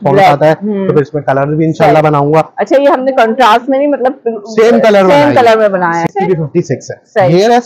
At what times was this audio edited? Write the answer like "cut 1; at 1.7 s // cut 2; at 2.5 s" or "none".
cut 1; at 6.1 s

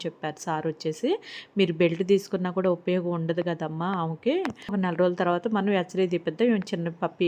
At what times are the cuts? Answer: cut 1; at 4.7 s

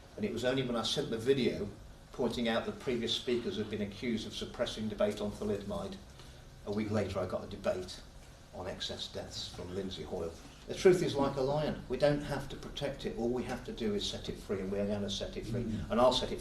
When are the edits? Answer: cut 1; at 10.5 s

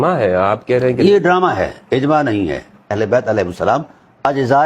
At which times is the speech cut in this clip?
cut 1; at 3.0 s

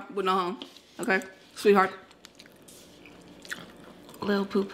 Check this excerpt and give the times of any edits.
none

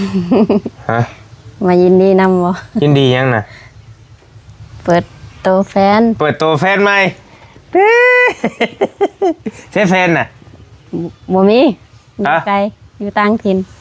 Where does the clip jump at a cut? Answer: none

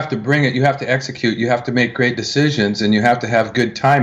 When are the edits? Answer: none

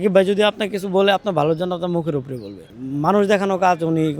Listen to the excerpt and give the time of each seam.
cut 1; at 2.8 s

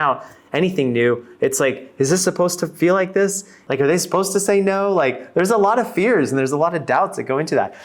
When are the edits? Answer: cut 1; at 3.6 s

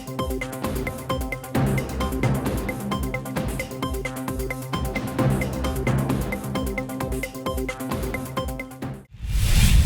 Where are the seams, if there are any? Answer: cut 1; at 8.9 s

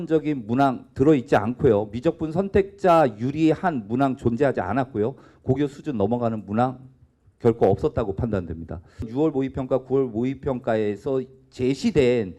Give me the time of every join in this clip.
cut 1; at 9.1 s

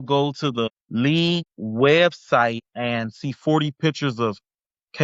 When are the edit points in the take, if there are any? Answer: none

